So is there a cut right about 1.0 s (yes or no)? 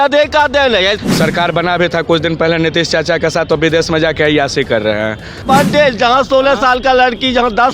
yes